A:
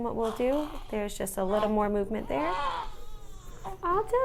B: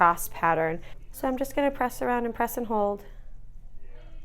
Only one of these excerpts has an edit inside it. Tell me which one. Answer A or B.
B